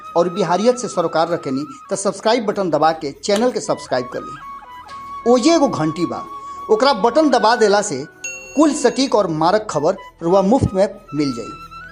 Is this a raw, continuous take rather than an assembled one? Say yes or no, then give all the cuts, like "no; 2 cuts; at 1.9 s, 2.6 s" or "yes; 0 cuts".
yes; 0 cuts